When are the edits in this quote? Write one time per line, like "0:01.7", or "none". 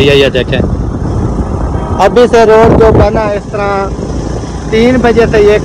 none